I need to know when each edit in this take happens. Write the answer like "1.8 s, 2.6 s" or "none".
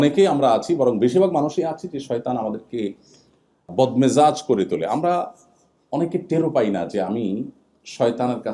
3.7 s